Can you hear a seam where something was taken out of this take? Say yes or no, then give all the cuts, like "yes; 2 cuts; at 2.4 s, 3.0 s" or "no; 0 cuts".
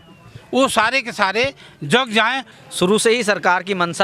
yes; 1 cut; at 2.5 s